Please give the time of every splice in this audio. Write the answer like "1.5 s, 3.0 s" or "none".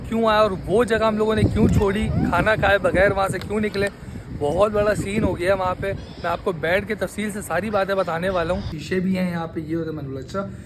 8.8 s